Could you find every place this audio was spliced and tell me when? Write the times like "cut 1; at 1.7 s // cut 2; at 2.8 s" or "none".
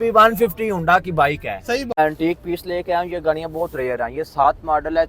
cut 1; at 1.9 s